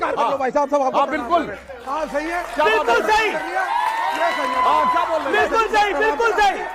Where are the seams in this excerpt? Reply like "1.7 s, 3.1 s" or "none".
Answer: none